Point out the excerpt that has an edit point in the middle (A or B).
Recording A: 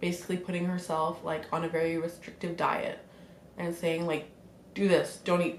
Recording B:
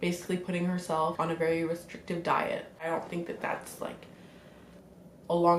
B